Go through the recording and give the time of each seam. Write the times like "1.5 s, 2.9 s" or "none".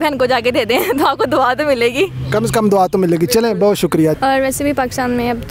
4.2 s